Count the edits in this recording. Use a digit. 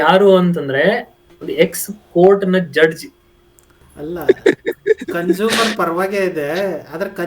1